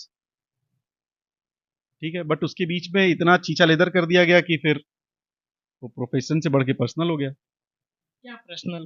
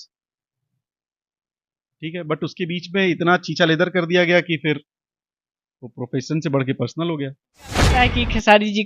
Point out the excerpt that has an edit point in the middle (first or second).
second